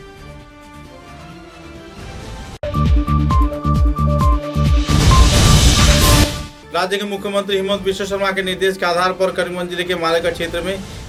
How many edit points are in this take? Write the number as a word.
zero